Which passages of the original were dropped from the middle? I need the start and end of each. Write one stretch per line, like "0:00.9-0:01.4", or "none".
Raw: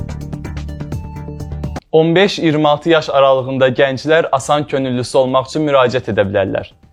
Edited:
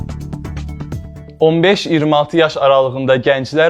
0:01.3-0:01.9